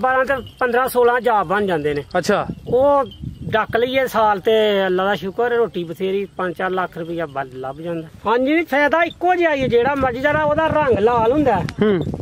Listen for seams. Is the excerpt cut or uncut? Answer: cut